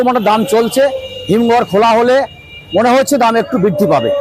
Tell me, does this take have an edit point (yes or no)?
no